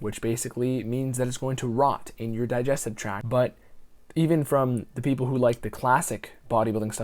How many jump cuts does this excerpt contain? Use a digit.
1